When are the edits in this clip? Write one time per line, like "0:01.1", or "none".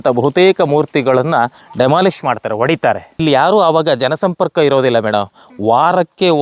0:03.2

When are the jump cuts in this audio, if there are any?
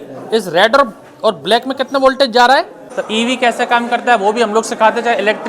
0:02.8

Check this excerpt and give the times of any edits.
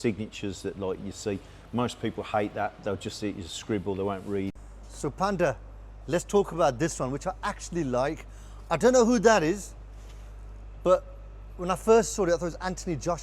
0:04.6

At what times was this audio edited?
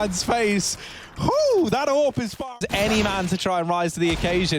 0:02.3

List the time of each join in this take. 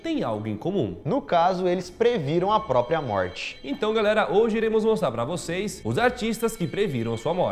none

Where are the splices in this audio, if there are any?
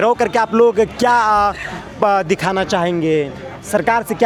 none

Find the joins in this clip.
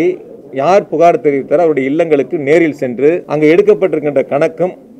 0:03.3

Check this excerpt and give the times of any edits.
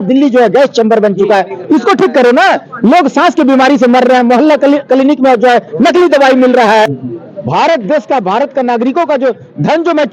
0:06.8

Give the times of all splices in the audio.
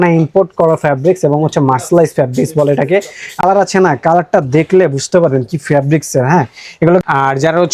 0:03.4
0:07.0

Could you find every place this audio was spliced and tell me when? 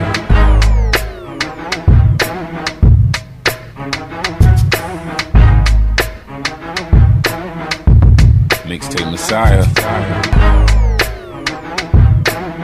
0:01.0
0:03.0
0:10.3

